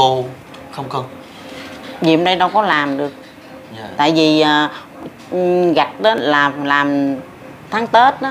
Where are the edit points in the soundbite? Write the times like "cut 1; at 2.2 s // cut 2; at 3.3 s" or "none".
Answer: none